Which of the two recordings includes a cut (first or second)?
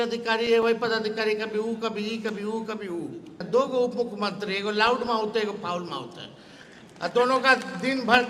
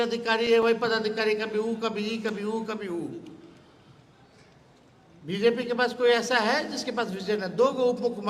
first